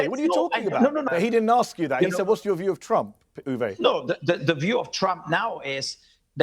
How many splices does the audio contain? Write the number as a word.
one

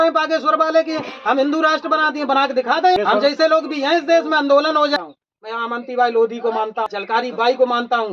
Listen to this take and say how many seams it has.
three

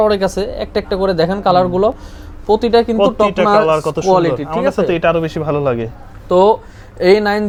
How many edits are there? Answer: zero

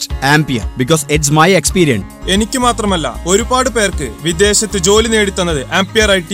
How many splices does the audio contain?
one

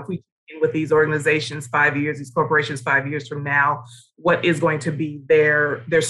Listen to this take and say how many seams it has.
zero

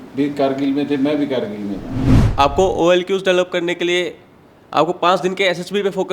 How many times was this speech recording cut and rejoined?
one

